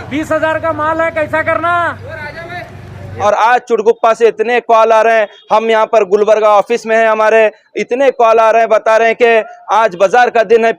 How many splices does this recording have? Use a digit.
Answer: 1